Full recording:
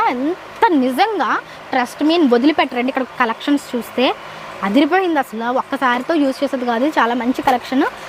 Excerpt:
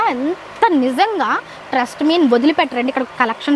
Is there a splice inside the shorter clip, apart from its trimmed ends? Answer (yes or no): no